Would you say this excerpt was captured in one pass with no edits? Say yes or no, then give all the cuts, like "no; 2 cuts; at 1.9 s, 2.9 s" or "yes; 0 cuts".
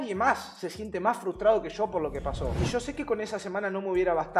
no; 1 cut; at 2.5 s